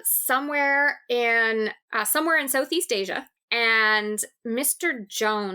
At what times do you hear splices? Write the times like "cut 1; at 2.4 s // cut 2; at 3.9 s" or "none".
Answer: cut 1; at 3.3 s